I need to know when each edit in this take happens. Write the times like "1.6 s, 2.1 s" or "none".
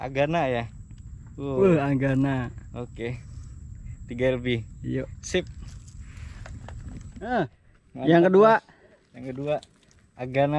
7.3 s